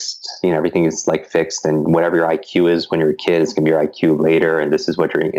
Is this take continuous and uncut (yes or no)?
yes